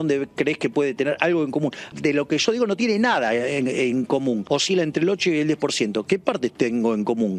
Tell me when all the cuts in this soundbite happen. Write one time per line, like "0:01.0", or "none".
0:01.9
0:04.4